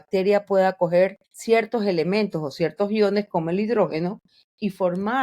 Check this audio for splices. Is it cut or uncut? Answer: cut